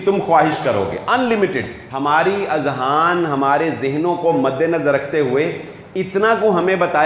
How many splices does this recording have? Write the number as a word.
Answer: one